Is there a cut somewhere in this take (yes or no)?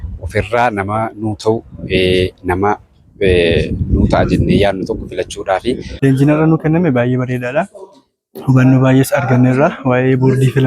yes